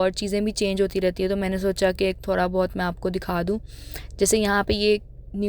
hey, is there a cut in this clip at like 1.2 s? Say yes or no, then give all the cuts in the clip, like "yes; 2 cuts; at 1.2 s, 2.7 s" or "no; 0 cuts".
no; 0 cuts